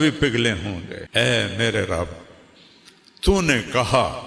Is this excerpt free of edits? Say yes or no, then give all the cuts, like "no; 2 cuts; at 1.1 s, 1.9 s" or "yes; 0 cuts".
no; 1 cut; at 0.9 s